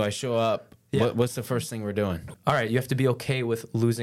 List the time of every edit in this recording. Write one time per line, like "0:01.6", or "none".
0:02.3